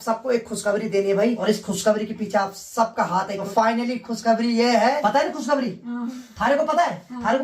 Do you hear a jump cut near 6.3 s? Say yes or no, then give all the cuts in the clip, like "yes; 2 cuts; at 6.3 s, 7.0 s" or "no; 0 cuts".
no; 3 cuts; at 1.4 s, 3.4 s, 5.0 s